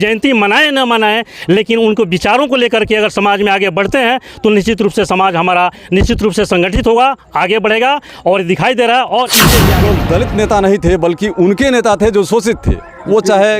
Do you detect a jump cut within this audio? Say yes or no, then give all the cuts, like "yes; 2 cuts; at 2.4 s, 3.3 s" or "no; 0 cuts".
yes; 1 cut; at 9.6 s